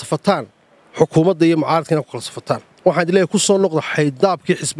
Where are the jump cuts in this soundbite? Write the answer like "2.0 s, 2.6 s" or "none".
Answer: none